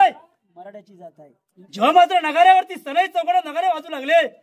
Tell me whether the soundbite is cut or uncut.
cut